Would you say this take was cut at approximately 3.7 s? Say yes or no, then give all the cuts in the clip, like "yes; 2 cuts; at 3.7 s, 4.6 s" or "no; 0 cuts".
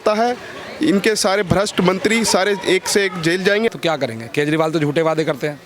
yes; 1 cut; at 3.7 s